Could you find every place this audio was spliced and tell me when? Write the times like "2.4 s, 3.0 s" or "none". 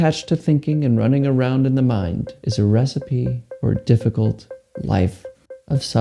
2.4 s, 3.4 s

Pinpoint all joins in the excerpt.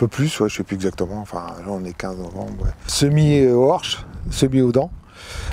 2.9 s

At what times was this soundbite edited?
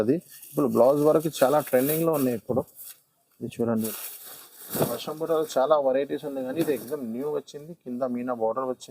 3.9 s

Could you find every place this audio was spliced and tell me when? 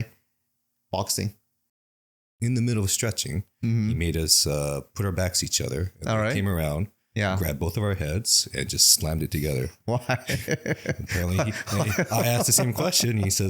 2.0 s

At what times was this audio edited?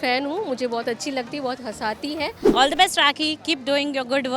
2.4 s

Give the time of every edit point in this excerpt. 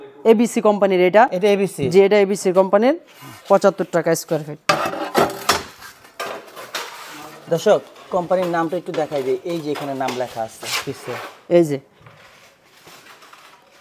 none

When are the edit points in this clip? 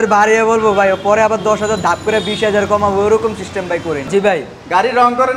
4.1 s

